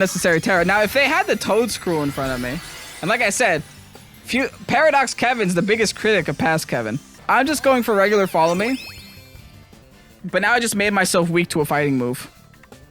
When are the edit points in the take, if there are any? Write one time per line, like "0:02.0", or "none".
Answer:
0:07.1